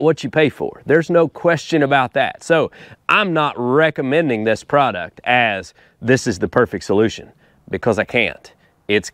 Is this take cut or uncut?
uncut